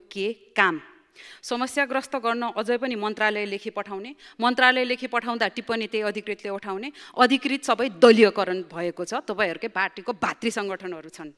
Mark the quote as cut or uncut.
uncut